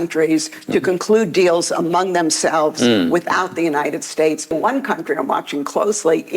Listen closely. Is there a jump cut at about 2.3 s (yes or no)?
no